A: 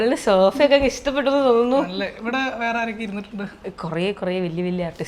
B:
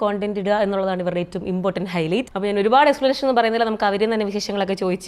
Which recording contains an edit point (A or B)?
B